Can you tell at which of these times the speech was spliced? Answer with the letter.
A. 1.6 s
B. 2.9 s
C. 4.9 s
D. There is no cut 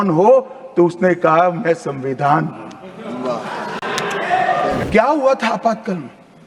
C